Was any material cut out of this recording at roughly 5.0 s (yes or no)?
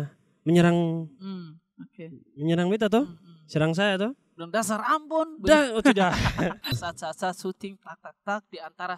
no